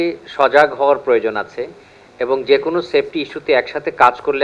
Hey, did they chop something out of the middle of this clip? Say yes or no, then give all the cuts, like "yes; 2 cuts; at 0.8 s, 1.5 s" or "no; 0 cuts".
no; 0 cuts